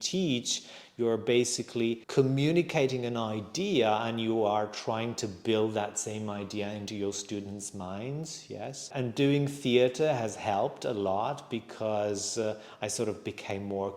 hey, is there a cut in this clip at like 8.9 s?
yes; 2 cuts; at 2.0 s, 8.9 s

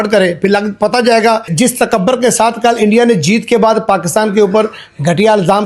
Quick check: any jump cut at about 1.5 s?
yes; 1 cut; at 1.5 s

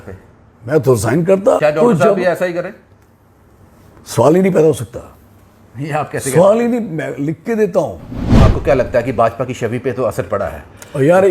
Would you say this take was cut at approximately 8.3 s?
yes; 2 cuts; at 1.6 s, 8.3 s

